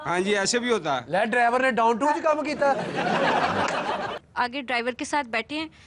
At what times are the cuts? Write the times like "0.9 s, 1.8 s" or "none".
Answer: 4.2 s